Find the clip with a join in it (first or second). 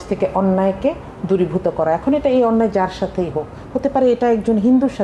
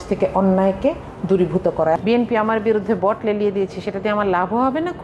second